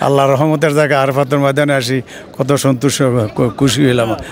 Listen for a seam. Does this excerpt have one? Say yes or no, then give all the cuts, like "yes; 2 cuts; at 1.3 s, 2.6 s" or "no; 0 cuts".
no; 0 cuts